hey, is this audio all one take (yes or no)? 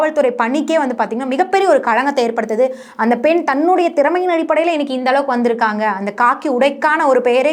yes